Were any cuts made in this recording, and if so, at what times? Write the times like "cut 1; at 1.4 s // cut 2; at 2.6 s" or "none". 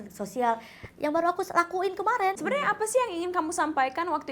cut 1; at 2.4 s